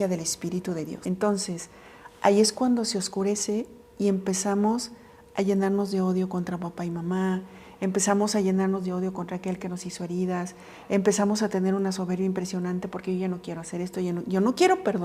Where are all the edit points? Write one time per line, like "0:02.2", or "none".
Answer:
0:01.0

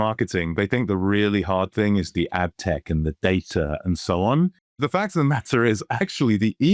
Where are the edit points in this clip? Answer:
0:04.8

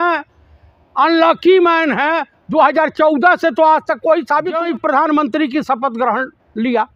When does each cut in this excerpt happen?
0:04.6

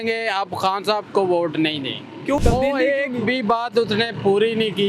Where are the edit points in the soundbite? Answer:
0:02.4

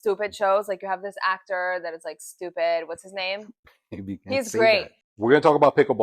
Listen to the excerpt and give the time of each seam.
0:05.0

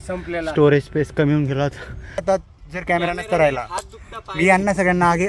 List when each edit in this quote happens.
0:02.1

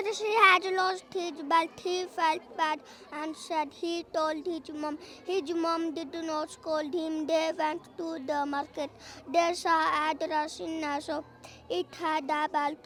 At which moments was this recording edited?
none

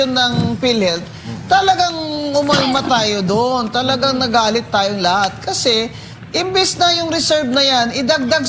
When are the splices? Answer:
none

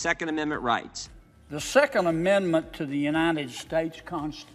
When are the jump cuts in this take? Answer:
0:01.1

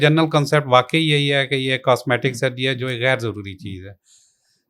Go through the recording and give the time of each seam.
none

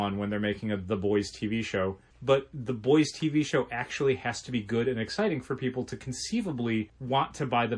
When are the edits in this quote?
0:02.1
0:07.0

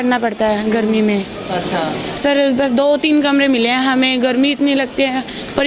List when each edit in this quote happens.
none

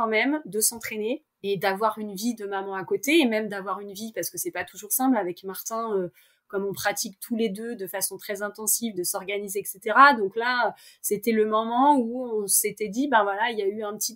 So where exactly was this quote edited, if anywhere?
none

